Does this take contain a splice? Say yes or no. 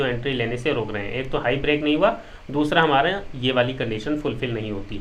no